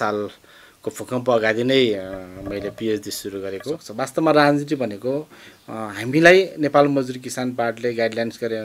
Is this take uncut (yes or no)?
no